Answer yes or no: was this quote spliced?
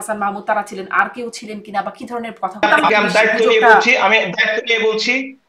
yes